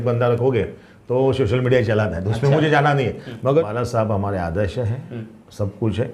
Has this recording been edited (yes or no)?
yes